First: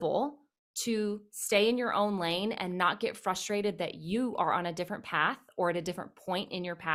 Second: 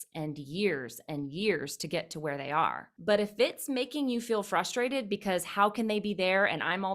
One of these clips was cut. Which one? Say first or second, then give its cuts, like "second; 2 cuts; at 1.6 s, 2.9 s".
second; 1 cut; at 2.9 s